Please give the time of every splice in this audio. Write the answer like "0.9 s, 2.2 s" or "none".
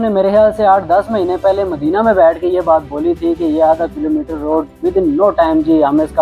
none